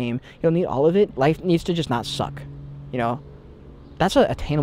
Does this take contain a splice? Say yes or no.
yes